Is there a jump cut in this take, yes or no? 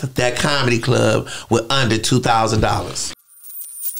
yes